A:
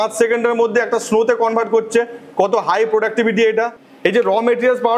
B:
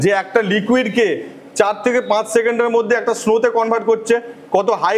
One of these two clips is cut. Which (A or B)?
A